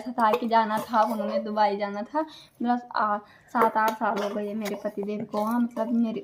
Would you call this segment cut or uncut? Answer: uncut